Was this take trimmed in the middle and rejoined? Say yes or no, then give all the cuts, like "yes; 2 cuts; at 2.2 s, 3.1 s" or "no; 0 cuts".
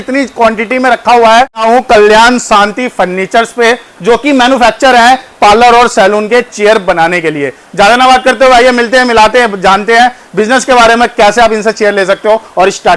no; 0 cuts